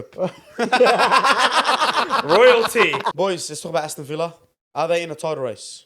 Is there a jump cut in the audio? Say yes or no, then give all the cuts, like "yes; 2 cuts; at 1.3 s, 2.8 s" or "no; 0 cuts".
yes; 1 cut; at 3.1 s